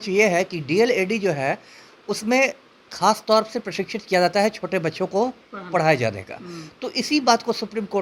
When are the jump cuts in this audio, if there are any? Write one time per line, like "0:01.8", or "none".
none